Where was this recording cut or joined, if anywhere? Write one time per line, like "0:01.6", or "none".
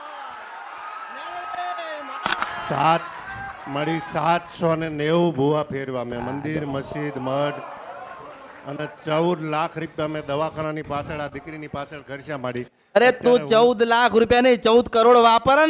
0:02.4